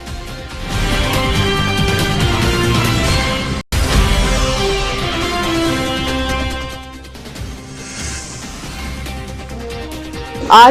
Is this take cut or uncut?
uncut